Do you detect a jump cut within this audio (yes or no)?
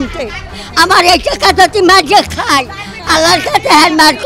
no